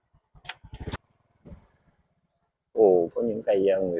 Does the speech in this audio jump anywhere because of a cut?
yes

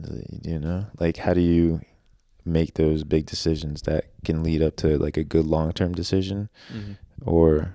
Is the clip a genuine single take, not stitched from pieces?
yes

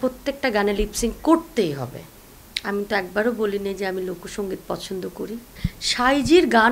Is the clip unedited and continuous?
yes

